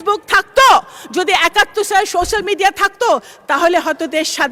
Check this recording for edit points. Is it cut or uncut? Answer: uncut